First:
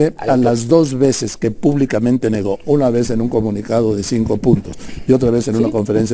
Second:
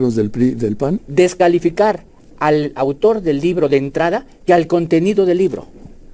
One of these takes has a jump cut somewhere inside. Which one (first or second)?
second